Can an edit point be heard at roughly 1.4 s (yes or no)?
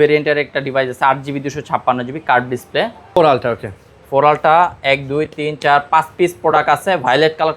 no